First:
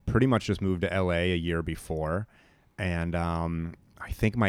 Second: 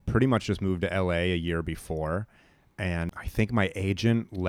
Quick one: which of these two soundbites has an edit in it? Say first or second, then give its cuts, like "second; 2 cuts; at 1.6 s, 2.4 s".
second; 1 cut; at 3.1 s